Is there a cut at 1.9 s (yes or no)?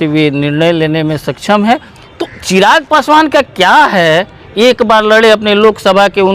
yes